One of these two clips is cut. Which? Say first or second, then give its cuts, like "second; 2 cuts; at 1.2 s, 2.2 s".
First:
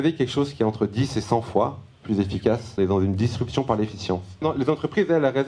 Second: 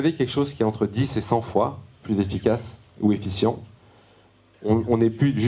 first; 2 cuts; at 2.8 s, 4.4 s